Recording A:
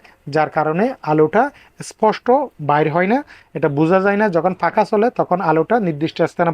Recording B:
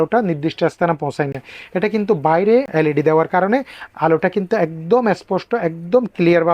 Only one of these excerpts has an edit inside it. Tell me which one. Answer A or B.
B